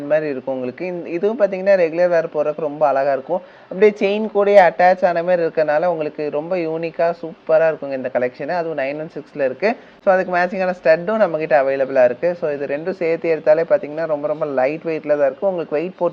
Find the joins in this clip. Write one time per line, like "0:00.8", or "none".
none